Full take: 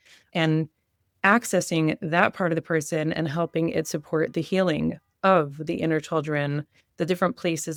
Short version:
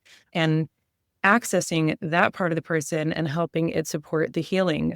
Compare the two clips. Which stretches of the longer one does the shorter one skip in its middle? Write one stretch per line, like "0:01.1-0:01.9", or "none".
none